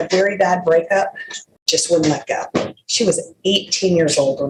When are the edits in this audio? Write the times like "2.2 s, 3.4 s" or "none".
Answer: none